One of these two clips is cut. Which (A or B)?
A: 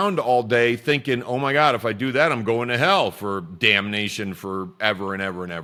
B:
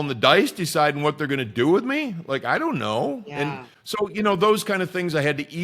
B